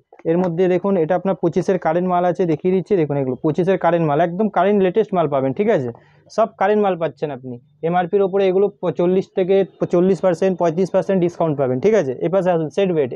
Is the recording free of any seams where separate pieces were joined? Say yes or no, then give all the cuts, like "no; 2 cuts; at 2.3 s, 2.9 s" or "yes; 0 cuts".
yes; 0 cuts